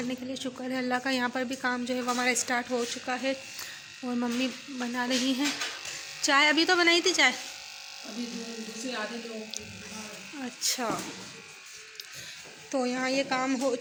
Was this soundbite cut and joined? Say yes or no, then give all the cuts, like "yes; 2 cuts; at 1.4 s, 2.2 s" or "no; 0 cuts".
no; 0 cuts